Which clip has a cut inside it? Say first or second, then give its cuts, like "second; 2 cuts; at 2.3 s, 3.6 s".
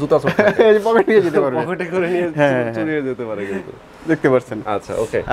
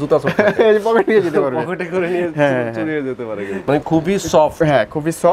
second; 1 cut; at 3.6 s